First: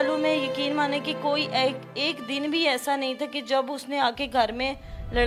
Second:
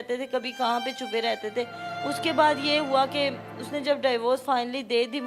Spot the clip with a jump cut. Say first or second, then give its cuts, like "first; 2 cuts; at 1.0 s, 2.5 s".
second; 1 cut; at 1.9 s